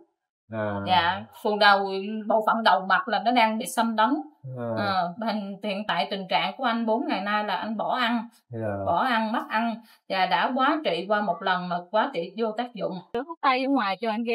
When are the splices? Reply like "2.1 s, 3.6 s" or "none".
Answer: 13.2 s